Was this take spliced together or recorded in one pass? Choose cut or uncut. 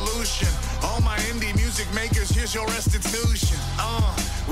uncut